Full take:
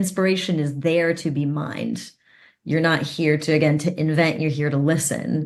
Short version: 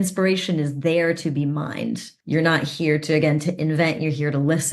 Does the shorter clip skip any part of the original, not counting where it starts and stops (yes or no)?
yes